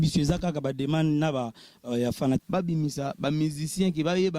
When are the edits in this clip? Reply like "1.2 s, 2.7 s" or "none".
2.4 s